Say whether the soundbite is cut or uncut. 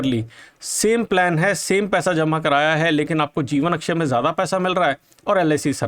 uncut